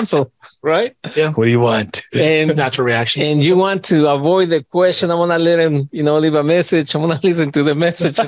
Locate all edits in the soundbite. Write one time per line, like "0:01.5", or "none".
none